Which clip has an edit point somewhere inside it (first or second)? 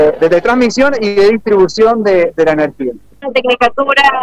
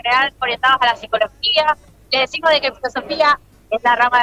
first